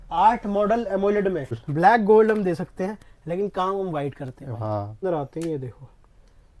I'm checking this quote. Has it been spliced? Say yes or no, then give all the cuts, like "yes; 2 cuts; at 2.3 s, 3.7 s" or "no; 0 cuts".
yes; 2 cuts; at 1.6 s, 5.0 s